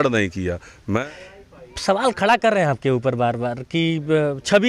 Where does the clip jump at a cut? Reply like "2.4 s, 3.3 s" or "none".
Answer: 1.0 s